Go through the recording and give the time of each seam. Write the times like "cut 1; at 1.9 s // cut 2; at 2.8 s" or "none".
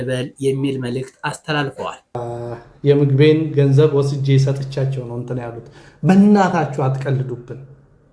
cut 1; at 2.2 s